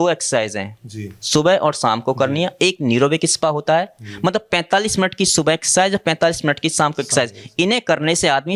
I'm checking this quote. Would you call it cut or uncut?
uncut